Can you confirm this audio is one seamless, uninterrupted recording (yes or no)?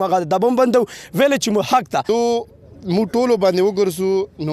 no